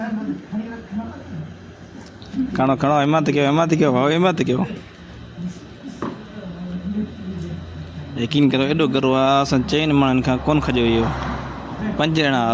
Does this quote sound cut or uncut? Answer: uncut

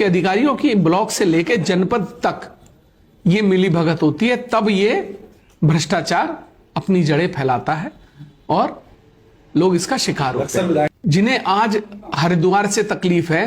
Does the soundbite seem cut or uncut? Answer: cut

